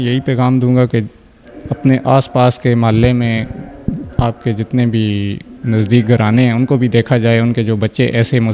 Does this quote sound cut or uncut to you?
uncut